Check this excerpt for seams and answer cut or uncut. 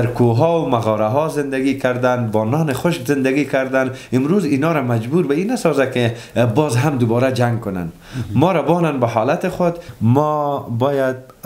cut